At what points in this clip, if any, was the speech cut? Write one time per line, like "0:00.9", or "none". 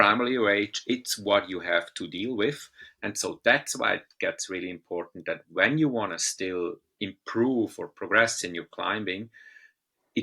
0:06.9